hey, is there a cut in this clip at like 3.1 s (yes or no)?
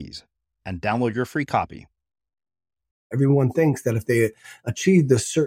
yes